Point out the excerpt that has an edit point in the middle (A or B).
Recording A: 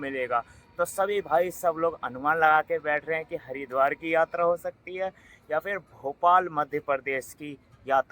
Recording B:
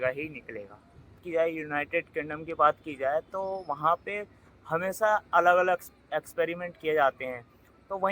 B